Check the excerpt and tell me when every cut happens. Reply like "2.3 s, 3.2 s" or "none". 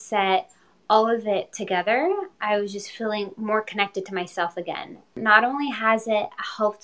5.2 s